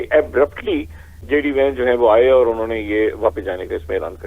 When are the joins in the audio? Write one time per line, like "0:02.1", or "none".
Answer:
0:01.2